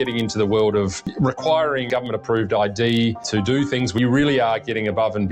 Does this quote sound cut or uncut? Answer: cut